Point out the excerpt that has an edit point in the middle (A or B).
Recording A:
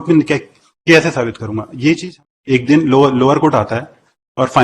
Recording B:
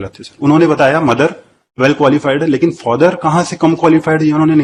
A